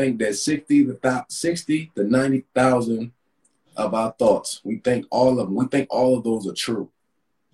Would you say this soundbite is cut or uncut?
cut